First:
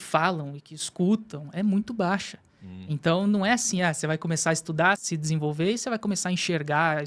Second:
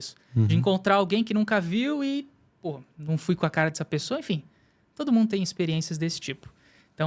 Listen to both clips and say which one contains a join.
first; 1 cut; at 5.0 s

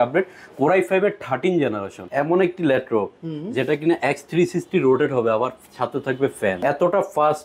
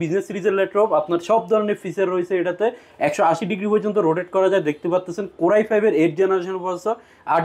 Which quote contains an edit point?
first; 2 cuts; at 2.0 s, 6.6 s

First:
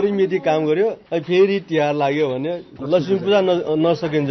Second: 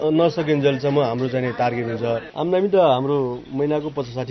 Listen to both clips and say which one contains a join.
second; 1 cut; at 2.3 s

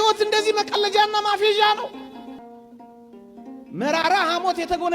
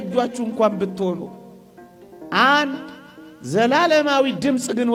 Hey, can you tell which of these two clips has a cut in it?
first; 1 cut; at 2.4 s

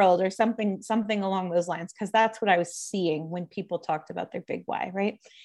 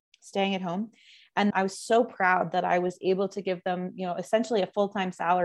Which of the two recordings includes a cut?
second; 1 cut; at 1.5 s

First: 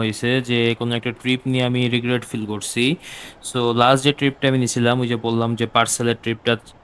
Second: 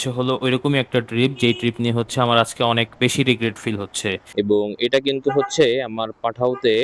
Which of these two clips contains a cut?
second; 1 cut; at 4.2 s

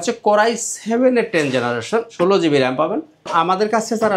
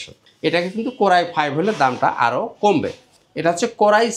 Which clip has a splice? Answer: first; 2 cuts; at 2.1 s, 3.3 s

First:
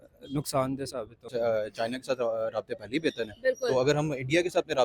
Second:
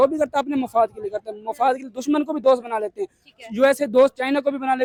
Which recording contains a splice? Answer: first; 1 cut; at 1.3 s

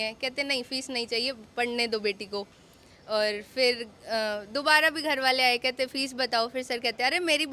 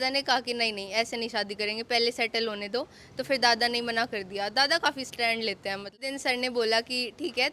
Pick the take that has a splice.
second; 1 cut; at 5.9 s

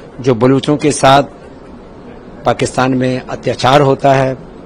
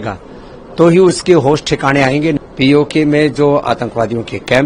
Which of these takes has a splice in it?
second; 1 cut; at 2.4 s

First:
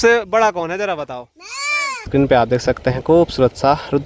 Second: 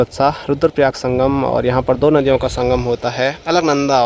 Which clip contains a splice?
first; 1 cut; at 2.1 s

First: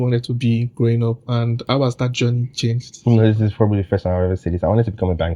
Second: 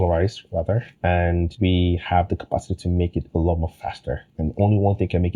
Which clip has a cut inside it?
second; 3 cuts; at 0.9 s, 1.5 s, 4.3 s

